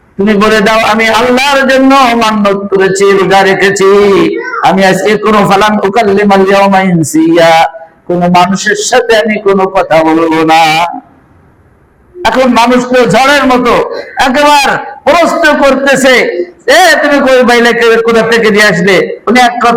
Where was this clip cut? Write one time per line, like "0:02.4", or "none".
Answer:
none